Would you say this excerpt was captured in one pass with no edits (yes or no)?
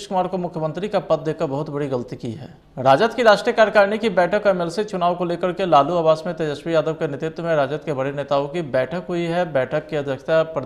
no